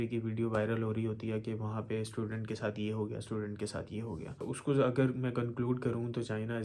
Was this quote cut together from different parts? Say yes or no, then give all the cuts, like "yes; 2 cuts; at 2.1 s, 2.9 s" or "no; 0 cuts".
no; 0 cuts